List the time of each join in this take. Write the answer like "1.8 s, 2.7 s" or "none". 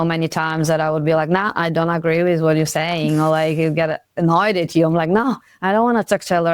none